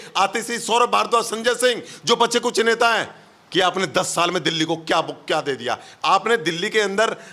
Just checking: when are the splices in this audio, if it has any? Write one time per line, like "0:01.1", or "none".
none